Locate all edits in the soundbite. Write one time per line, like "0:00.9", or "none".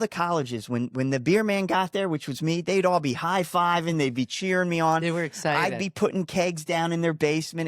none